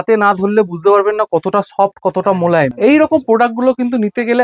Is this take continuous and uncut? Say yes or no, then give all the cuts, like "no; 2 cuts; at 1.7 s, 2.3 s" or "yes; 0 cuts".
no; 1 cut; at 2.7 s